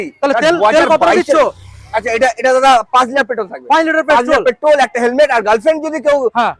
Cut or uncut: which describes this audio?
uncut